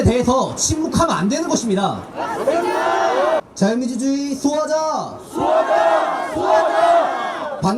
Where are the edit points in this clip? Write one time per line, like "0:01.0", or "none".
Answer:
0:03.4